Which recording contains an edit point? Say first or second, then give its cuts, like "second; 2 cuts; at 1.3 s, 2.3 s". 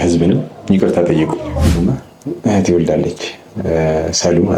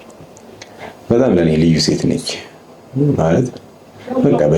first; 1 cut; at 1.7 s